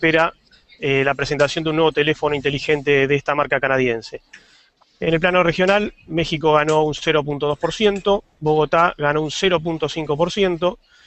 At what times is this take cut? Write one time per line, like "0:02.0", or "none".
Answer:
0:06.6